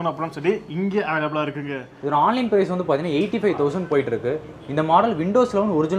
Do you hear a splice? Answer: yes; 1 cut; at 1.9 s

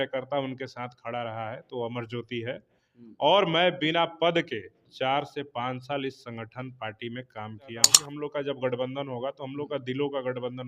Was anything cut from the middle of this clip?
yes; 1 cut; at 8.0 s

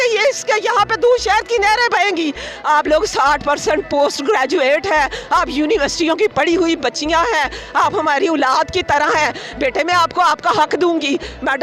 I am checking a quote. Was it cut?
yes; 1 cut; at 2.5 s

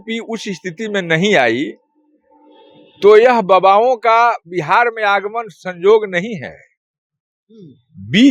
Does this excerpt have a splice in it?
no; 0 cuts

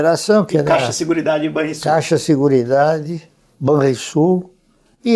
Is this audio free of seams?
yes; 0 cuts

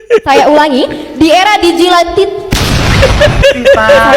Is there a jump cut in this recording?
no; 0 cuts

